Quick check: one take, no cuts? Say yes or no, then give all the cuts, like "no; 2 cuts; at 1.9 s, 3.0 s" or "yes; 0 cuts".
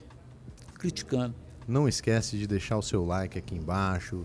no; 1 cut; at 1.5 s